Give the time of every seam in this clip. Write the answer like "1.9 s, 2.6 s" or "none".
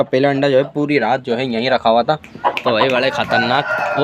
2.3 s